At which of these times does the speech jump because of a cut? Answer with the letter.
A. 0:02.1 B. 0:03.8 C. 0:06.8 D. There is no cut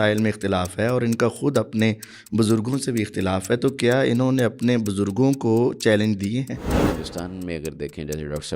C